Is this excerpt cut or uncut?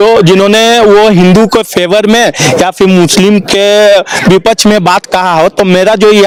uncut